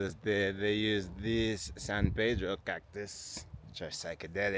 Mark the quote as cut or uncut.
uncut